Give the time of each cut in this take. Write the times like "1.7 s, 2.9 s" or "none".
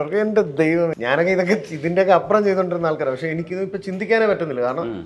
1.0 s, 3.4 s